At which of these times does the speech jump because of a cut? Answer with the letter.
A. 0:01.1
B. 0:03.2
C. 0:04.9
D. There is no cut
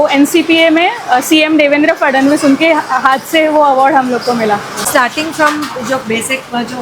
C